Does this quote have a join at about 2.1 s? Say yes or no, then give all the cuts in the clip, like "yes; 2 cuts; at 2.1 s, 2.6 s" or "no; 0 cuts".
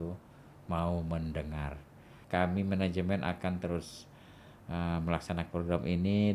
yes; 1 cut; at 2.1 s